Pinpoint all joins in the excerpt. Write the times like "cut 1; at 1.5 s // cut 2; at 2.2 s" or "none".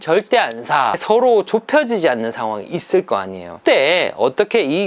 cut 1; at 1.0 s // cut 2; at 3.6 s